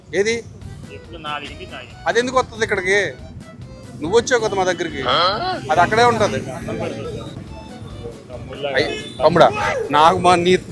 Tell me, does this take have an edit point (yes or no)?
yes